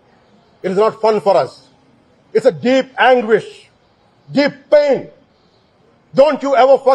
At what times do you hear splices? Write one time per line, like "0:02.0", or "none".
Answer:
none